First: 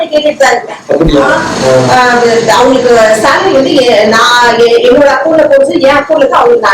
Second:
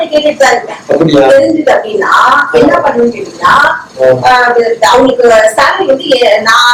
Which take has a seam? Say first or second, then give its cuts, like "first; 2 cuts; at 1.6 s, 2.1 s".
first; 1 cut; at 1.3 s